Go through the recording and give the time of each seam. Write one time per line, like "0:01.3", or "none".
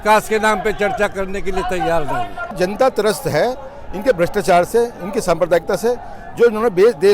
0:02.5